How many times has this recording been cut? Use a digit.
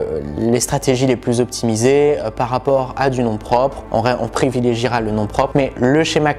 0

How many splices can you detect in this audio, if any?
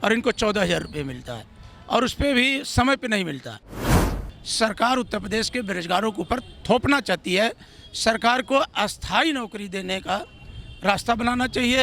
1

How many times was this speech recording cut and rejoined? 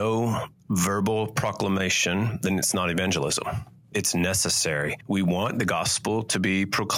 2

